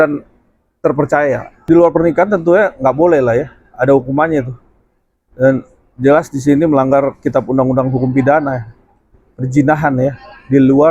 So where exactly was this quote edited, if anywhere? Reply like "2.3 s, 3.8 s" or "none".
1.5 s